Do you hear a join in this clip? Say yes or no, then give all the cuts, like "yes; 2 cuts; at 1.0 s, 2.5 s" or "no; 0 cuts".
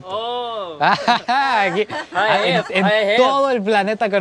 no; 0 cuts